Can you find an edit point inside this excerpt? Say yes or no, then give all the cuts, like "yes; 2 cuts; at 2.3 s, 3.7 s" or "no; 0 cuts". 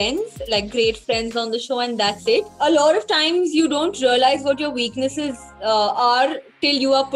yes; 1 cut; at 2.5 s